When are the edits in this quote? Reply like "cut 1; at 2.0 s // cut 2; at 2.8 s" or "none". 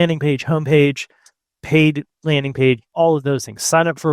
cut 1; at 2.9 s